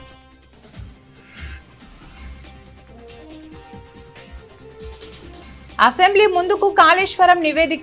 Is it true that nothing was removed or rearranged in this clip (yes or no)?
no